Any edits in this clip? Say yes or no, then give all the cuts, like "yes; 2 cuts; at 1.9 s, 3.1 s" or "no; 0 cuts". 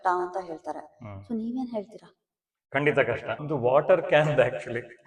yes; 1 cut; at 3.3 s